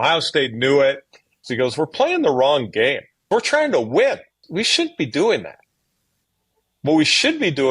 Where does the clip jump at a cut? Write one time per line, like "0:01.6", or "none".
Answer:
0:01.5
0:03.3
0:04.4